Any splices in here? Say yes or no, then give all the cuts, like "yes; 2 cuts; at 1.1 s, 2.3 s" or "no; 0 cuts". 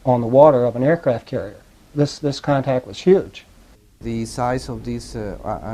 yes; 1 cut; at 4.0 s